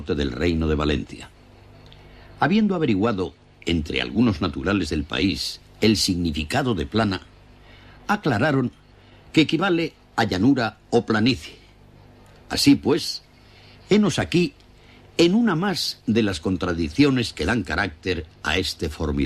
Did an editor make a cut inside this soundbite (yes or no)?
yes